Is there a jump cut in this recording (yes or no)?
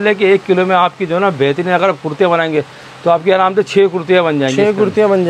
no